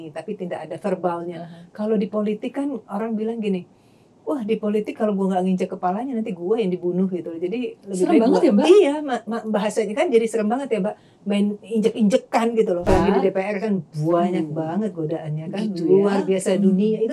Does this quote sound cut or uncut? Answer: cut